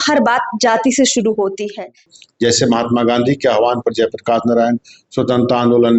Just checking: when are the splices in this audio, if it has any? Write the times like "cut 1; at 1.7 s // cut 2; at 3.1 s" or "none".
cut 1; at 2.1 s